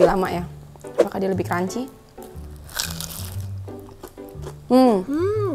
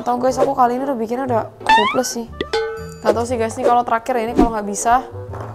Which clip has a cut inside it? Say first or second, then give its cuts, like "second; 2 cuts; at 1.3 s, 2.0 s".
second; 1 cut; at 2.9 s